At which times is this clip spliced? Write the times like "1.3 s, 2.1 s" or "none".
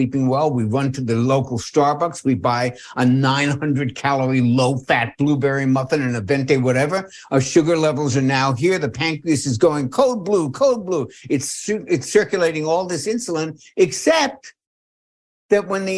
none